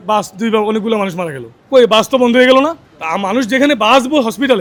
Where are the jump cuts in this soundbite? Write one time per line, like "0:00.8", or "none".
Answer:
none